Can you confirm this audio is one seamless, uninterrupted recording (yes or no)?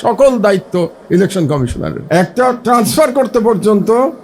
no